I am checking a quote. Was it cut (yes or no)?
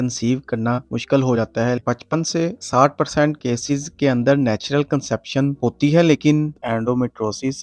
yes